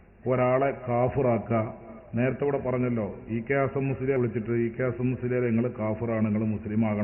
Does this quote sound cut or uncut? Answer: cut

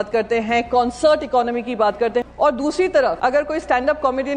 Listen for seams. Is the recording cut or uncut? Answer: cut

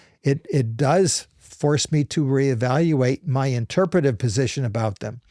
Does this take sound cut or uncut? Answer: uncut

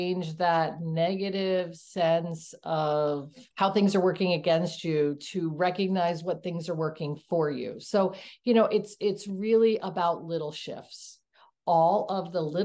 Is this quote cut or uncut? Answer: cut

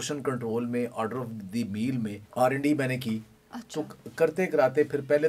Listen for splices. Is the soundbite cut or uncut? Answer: cut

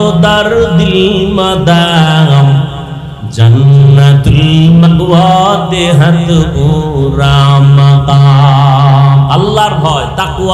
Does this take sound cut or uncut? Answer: uncut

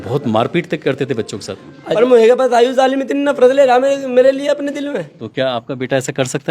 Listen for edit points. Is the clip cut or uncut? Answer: cut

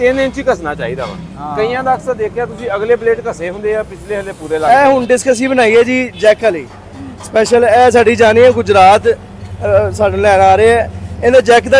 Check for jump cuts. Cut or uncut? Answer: cut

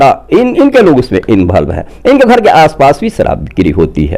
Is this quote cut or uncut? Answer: uncut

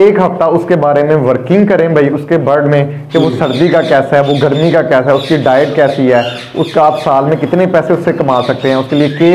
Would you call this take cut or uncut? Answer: uncut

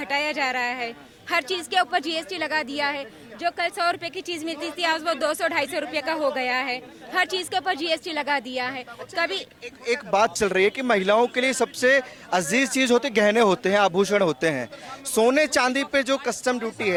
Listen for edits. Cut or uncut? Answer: uncut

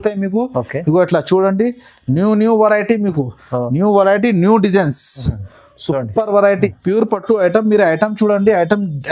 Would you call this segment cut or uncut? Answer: cut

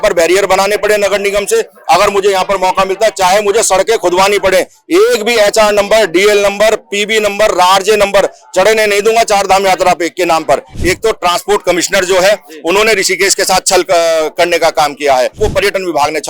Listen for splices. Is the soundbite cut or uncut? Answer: cut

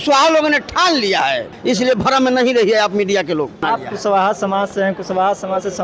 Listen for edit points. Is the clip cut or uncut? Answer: cut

